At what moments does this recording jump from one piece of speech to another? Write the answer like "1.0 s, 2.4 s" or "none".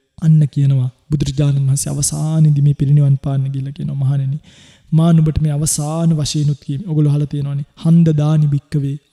none